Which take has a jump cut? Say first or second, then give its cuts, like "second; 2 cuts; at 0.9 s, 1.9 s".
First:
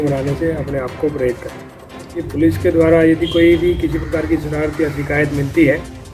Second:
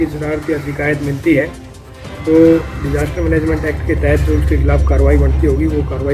first; 1 cut; at 2.3 s